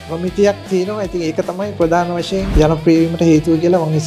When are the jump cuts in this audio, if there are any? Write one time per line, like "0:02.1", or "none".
0:02.5